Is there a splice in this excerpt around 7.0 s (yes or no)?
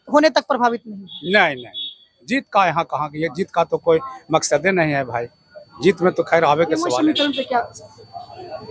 yes